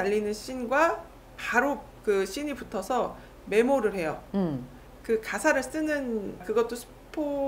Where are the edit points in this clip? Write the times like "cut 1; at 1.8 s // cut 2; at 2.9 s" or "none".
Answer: none